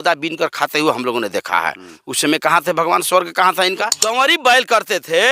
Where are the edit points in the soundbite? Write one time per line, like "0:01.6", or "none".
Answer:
0:04.0

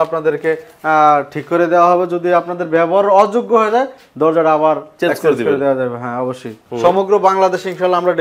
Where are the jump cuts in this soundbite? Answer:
0:06.6

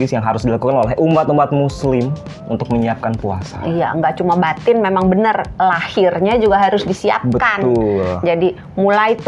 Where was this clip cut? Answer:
none

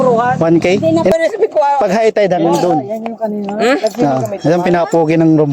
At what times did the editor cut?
0:01.1

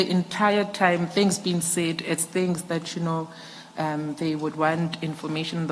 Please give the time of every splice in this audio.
none

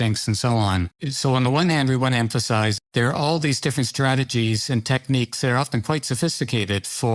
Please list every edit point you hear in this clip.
0:01.0
0:02.7

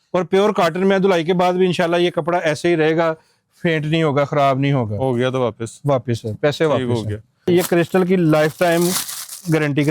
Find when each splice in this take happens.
0:07.5

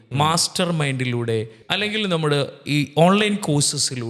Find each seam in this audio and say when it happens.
0:01.6

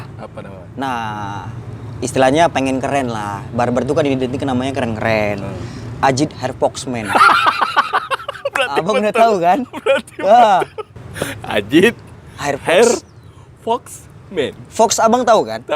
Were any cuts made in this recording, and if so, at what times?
0:10.9

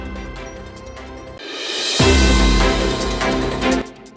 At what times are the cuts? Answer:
none

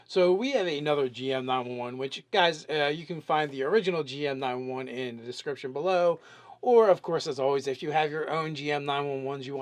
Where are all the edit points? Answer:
none

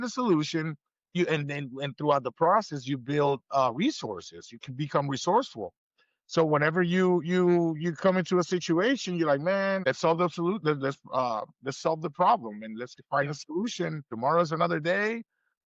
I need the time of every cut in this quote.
0:01.1
0:09.8
0:14.0

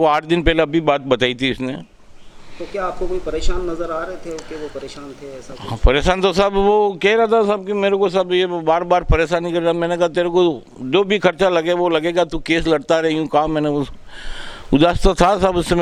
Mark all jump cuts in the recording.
none

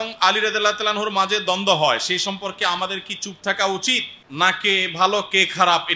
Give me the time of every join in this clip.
0:04.2

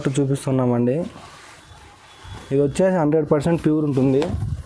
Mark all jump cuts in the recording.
none

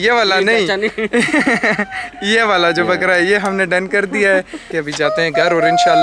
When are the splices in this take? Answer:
0:04.7

